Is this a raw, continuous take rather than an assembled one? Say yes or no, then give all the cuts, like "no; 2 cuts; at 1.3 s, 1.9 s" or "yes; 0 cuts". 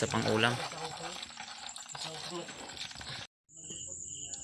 yes; 0 cuts